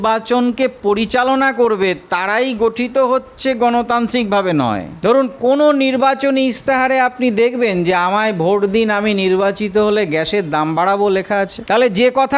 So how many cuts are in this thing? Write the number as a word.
two